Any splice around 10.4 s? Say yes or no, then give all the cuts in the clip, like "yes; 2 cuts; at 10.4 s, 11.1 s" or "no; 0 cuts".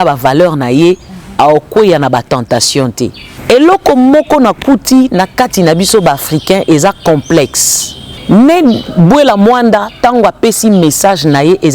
no; 2 cuts; at 3.3 s, 8.2 s